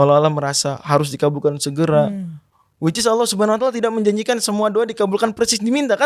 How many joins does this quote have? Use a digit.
0